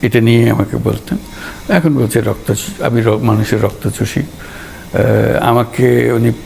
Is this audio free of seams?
yes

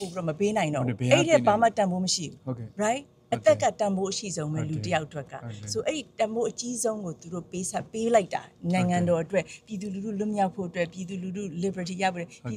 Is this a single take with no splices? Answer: yes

